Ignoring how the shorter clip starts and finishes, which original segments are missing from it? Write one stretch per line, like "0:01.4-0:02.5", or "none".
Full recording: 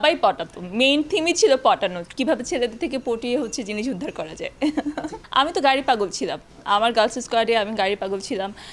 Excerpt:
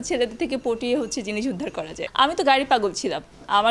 0:04.5-0:05.2

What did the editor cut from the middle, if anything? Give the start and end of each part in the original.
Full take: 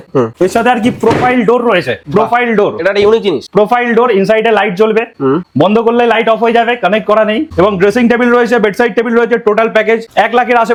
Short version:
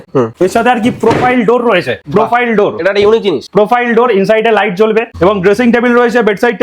0:05.1-0:07.5

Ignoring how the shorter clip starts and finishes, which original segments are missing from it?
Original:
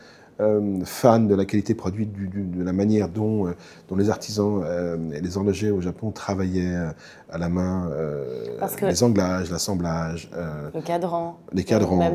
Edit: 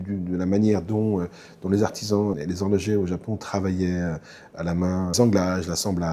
0:04.6-0:05.1
0:07.9-0:09.0

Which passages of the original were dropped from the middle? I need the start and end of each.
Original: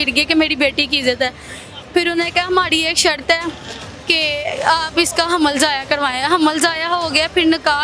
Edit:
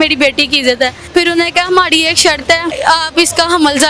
0:01.4-0:01.8
0:03.6-0:04.6

